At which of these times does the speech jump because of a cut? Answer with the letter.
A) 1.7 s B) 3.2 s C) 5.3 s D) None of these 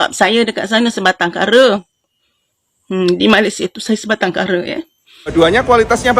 C